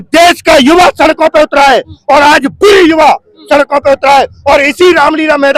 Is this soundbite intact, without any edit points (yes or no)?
yes